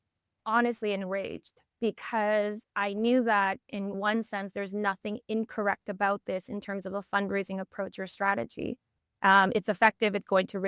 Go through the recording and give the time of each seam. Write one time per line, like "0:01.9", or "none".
0:04.0